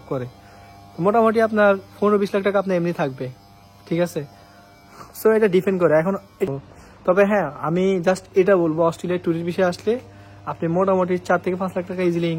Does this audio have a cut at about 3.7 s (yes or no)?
no